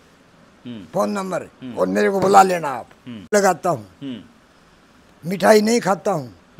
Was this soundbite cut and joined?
yes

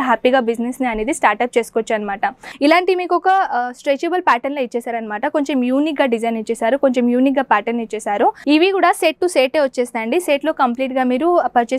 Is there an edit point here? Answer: yes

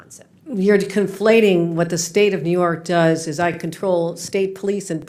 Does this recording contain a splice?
no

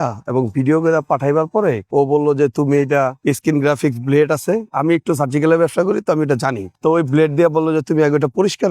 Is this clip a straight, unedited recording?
yes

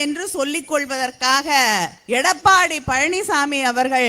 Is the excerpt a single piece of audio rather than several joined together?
no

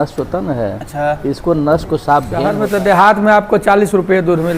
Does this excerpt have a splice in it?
yes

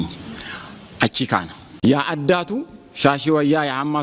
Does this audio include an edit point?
yes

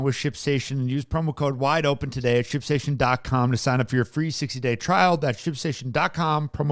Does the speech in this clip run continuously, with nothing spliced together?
yes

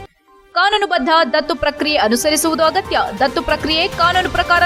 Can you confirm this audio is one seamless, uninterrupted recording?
yes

